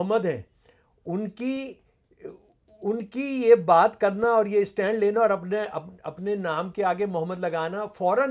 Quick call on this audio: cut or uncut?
uncut